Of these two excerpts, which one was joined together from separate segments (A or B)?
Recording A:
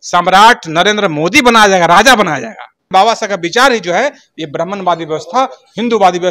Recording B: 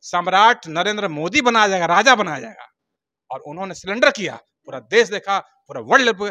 A